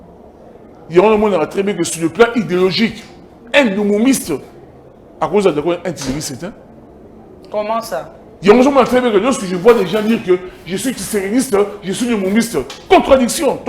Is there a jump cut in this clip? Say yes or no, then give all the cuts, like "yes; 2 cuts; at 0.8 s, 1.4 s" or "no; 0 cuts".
no; 0 cuts